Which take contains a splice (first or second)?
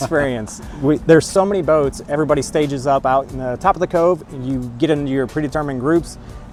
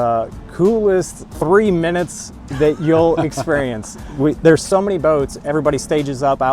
second